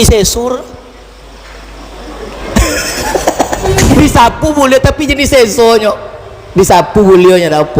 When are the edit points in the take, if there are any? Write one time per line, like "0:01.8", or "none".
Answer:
0:03.8